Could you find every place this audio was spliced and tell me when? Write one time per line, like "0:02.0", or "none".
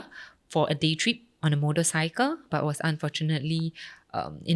none